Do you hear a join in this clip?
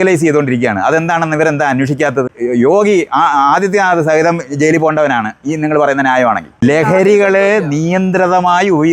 yes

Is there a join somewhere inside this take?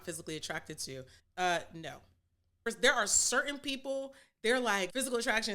yes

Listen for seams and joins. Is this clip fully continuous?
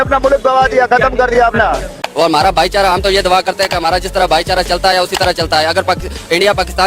no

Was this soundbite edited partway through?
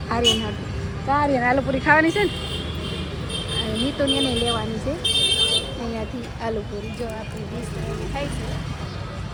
no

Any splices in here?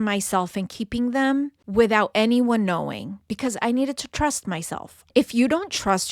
yes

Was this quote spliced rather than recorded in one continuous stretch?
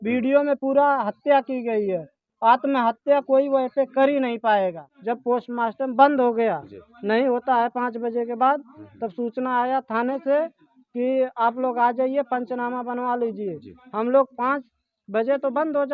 yes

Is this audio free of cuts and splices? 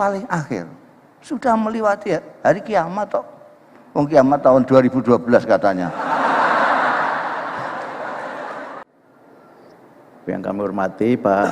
no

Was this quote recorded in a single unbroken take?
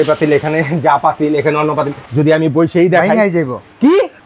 no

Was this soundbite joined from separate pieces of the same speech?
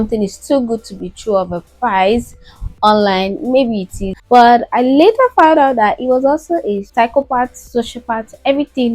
yes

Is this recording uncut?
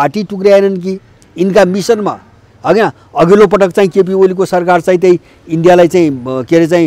yes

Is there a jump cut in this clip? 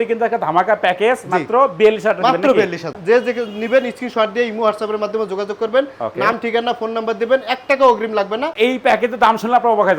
yes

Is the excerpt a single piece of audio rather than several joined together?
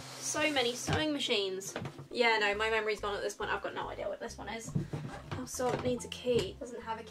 yes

